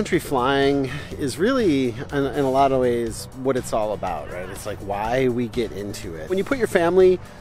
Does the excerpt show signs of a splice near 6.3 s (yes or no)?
yes